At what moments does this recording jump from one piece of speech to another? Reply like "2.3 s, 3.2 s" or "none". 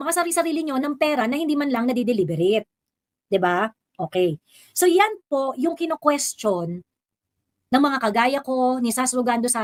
none